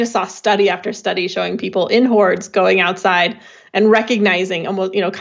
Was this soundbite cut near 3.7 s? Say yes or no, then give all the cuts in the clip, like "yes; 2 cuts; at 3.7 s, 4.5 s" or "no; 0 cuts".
no; 0 cuts